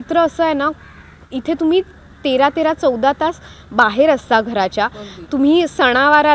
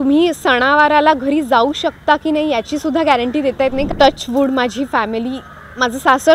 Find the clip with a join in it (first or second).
second